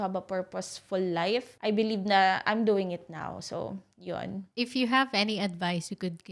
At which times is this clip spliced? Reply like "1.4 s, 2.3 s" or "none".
none